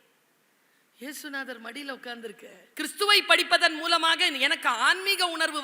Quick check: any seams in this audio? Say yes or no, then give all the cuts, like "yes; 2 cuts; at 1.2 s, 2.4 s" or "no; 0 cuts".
yes; 1 cut; at 2.6 s